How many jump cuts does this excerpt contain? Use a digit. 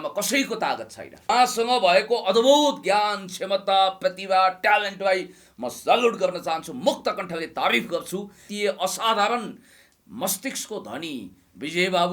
2